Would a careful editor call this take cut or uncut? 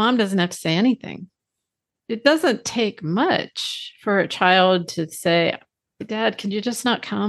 cut